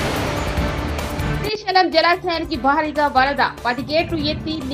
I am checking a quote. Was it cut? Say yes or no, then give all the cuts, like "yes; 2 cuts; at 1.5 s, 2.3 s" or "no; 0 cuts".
no; 0 cuts